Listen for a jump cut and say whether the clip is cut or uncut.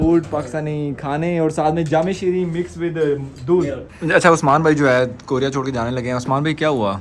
cut